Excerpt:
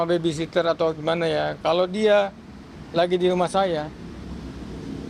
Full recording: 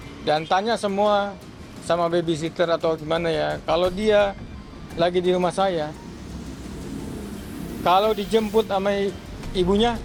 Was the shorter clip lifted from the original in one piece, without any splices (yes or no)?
yes